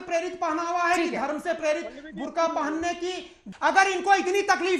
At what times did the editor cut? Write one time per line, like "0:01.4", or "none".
0:03.4